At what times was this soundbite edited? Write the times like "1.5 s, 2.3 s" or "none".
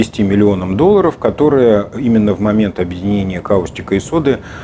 none